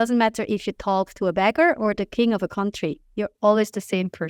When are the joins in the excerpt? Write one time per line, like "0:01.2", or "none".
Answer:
none